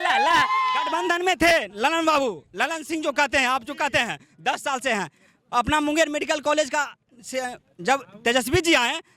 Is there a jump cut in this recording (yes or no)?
yes